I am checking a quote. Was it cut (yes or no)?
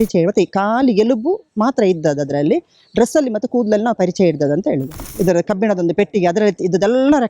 yes